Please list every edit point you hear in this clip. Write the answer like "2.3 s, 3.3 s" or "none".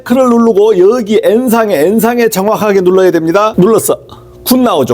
3.5 s

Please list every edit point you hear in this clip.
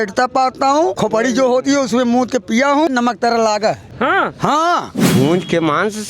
1.0 s, 2.9 s, 3.9 s, 5.0 s

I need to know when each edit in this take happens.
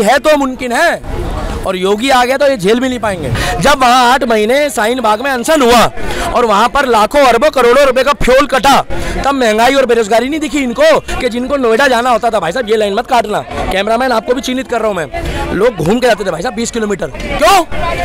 3.4 s

